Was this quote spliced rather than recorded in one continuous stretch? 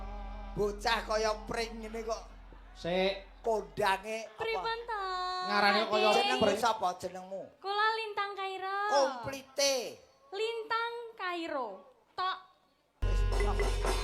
yes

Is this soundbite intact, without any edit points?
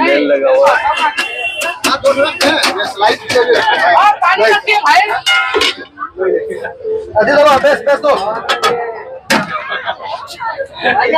yes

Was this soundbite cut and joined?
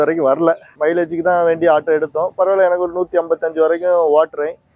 no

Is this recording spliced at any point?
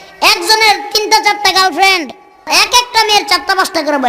yes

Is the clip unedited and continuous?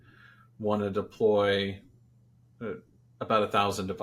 yes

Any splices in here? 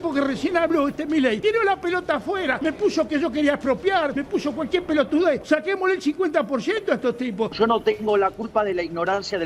yes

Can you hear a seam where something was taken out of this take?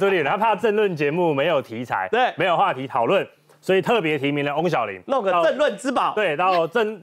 no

